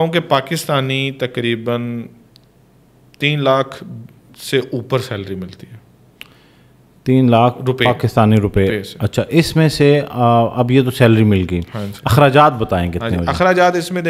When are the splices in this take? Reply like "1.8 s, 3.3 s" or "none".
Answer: none

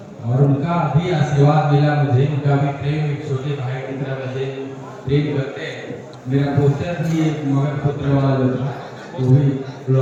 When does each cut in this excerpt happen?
none

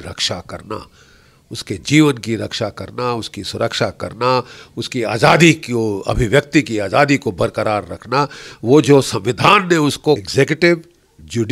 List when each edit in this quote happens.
10.2 s

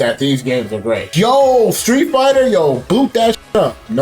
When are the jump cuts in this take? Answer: 1.1 s

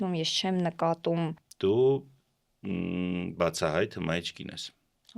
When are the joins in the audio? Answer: 1.4 s

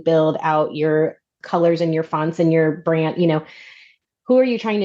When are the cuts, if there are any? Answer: 1.4 s, 3.8 s

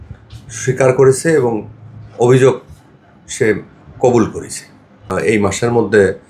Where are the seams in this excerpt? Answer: 5.1 s

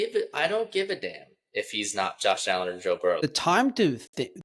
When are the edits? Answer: 3.2 s

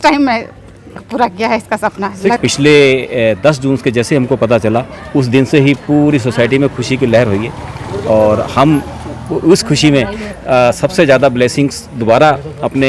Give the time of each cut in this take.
2.4 s

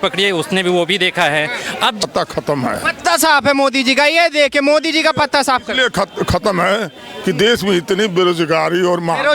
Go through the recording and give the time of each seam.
2.0 s

